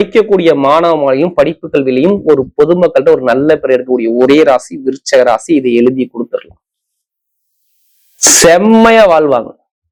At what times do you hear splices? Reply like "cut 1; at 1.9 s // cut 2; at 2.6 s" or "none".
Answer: none